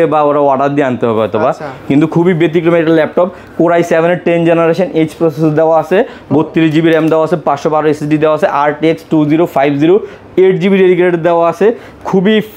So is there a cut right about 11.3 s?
no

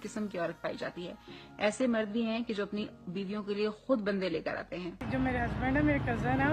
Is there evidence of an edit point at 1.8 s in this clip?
no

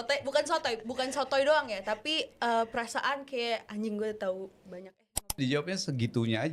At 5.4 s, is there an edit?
yes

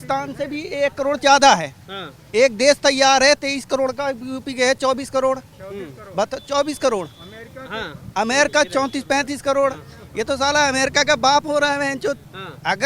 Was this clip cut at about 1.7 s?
no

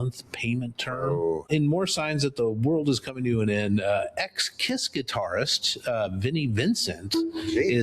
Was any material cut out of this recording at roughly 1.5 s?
yes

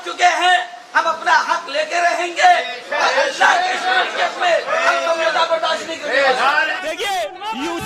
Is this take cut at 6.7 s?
yes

